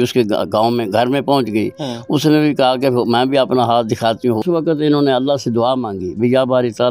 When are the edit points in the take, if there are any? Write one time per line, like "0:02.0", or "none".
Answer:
0:04.4